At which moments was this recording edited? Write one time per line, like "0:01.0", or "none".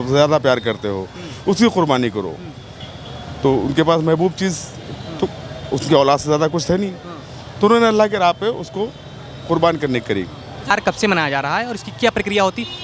0:10.7